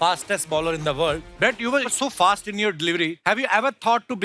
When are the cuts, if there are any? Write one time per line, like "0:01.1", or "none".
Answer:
0:01.3
0:03.2